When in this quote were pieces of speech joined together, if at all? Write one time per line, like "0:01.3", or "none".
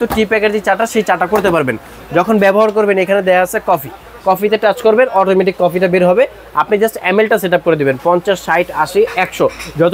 none